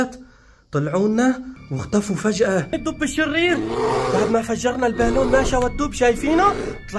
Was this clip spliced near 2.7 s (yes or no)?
yes